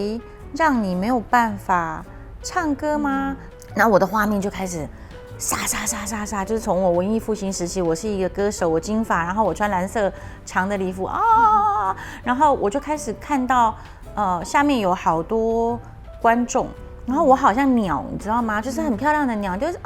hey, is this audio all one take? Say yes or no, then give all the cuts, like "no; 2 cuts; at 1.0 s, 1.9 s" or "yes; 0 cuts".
yes; 0 cuts